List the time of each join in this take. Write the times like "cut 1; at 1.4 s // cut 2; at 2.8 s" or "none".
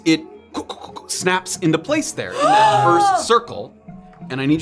none